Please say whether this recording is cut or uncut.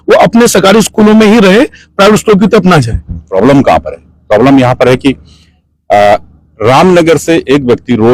cut